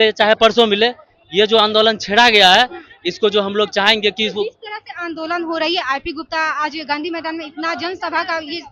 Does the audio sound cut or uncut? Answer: uncut